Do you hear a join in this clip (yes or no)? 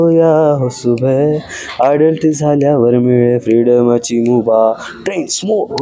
no